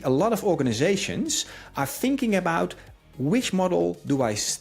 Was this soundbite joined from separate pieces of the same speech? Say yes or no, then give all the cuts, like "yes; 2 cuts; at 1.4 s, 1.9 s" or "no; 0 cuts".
no; 0 cuts